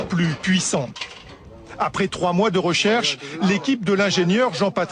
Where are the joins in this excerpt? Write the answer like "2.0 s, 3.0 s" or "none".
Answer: 3.6 s